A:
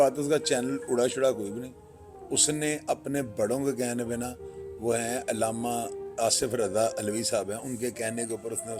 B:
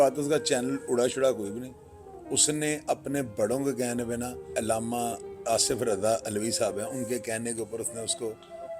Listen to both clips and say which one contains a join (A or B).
B